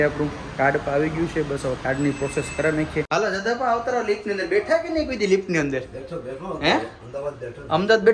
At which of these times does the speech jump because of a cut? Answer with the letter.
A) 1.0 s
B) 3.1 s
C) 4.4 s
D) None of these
B